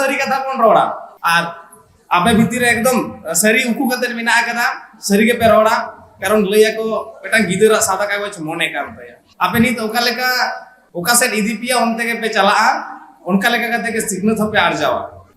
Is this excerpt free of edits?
yes; 0 cuts

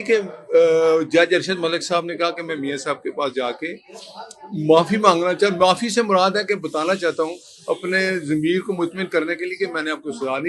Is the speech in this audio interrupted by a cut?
no; 0 cuts

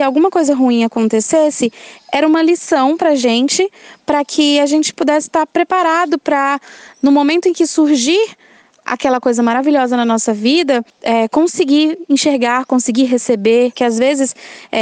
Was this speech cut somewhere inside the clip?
yes; 3 cuts; at 5.0 s, 10.9 s, 13.8 s

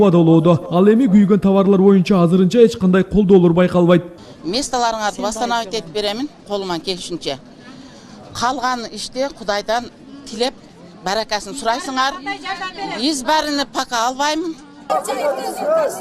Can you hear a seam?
no; 0 cuts

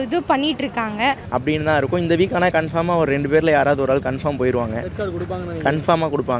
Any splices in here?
yes; 1 cut; at 1.3 s

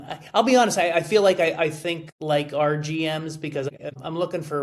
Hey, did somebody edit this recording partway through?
yes; 2 cuts; at 1.6 s, 3.7 s

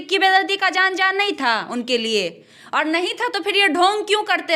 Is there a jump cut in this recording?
no; 0 cuts

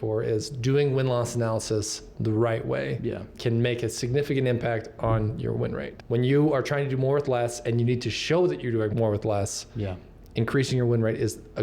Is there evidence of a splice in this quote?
yes; 2 cuts; at 5.9 s, 8.9 s

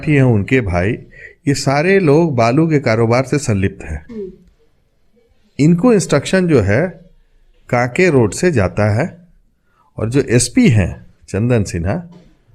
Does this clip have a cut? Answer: no; 0 cuts

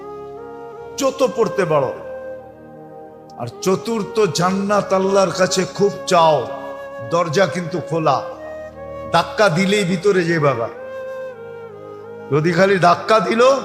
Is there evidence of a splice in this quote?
yes; 2 cuts; at 1.9 s, 3.3 s

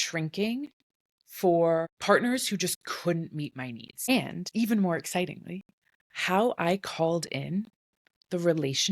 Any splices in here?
no; 0 cuts

